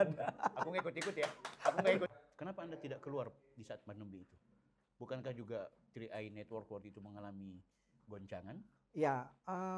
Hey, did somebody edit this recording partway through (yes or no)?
yes